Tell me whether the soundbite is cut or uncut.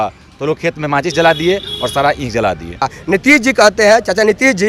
cut